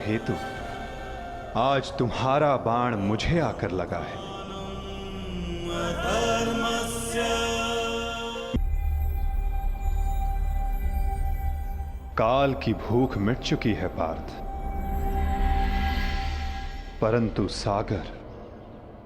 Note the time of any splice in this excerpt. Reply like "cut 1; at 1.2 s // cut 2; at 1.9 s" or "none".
cut 1; at 8.6 s